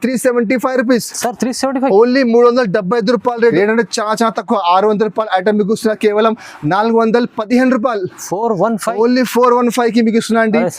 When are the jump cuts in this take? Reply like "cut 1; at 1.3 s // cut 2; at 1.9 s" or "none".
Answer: cut 1; at 3.5 s